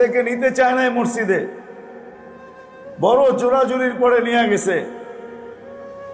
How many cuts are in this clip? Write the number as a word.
one